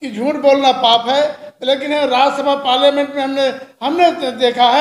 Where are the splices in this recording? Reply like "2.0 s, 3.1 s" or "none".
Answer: none